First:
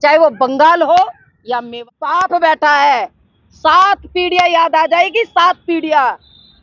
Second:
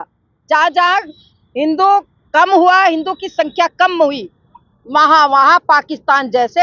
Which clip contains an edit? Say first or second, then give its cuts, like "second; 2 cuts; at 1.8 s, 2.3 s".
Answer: first; 1 cut; at 1.8 s